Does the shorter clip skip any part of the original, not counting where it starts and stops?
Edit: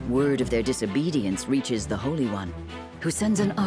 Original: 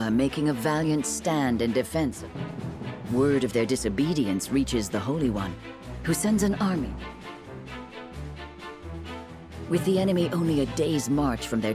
no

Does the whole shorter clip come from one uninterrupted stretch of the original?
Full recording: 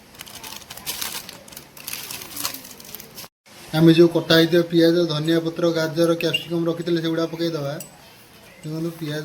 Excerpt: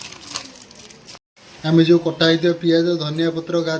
yes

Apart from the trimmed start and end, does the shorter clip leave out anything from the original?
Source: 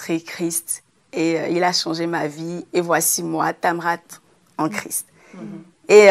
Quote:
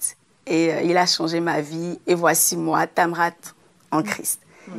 no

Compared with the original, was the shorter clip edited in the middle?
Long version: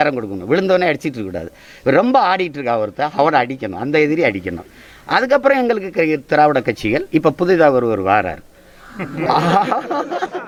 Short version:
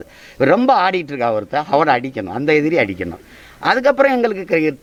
no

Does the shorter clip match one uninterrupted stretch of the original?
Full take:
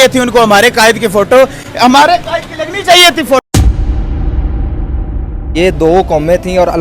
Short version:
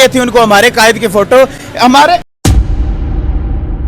no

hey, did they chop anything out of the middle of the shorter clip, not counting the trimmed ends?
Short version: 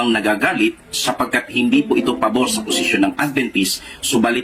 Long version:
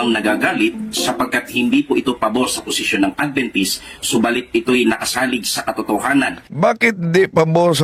no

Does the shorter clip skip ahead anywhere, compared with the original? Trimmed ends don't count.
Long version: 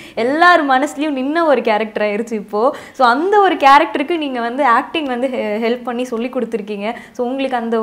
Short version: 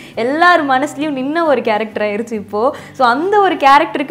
no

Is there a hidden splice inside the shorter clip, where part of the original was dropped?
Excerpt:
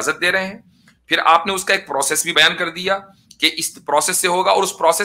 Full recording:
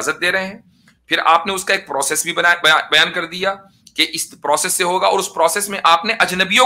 yes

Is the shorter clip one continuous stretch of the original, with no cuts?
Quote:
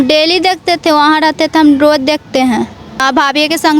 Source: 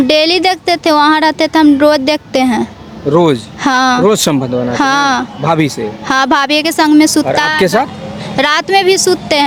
no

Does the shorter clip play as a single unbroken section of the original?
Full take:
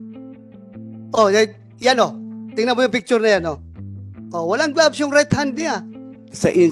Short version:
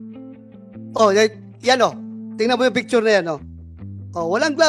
no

